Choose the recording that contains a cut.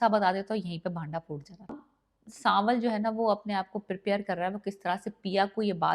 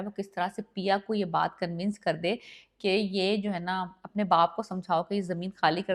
first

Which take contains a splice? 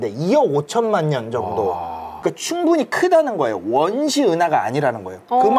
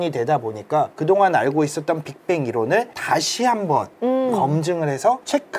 first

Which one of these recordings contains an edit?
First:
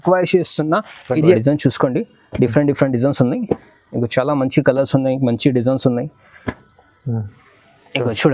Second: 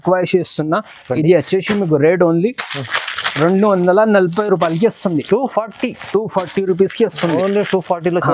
first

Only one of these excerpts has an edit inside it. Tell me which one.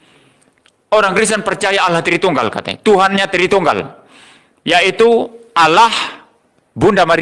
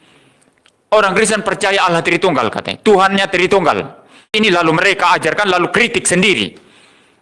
second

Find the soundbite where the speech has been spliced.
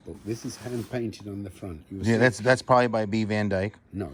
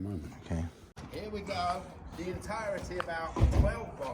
second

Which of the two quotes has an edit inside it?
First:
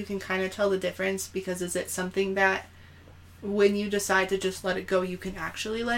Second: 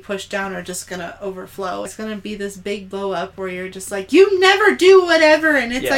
second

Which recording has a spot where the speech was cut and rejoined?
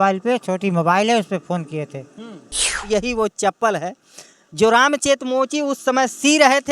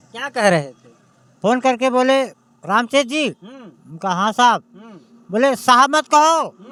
first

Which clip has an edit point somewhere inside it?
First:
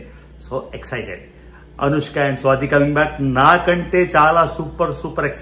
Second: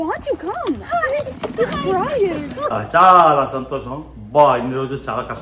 second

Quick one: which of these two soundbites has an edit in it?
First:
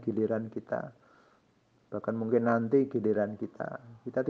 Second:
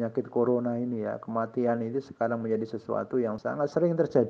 second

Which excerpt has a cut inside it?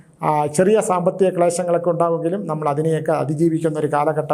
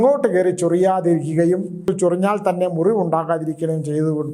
second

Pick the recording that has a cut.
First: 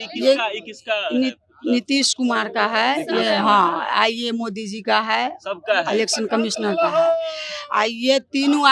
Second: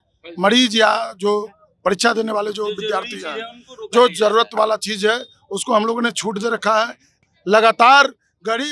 second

